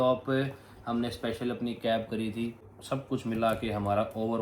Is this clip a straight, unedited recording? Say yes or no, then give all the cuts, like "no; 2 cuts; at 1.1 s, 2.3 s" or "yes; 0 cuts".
no; 1 cut; at 2.7 s